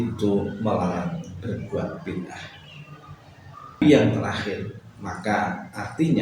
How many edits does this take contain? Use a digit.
1